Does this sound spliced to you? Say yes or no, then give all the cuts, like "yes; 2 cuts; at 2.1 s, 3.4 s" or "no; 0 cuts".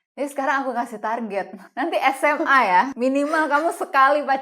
yes; 2 cuts; at 1.6 s, 2.9 s